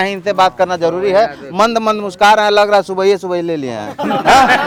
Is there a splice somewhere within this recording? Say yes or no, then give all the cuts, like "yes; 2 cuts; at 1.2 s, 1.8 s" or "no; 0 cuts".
no; 0 cuts